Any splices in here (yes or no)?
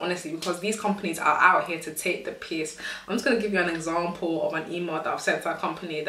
no